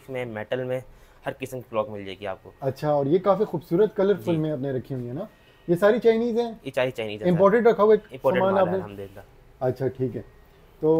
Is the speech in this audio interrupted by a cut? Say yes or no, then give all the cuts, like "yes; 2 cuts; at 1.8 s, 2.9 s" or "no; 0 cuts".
no; 0 cuts